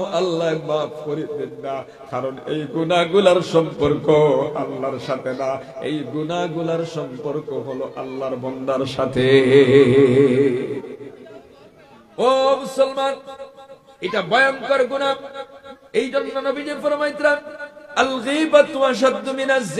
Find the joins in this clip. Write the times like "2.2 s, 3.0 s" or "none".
none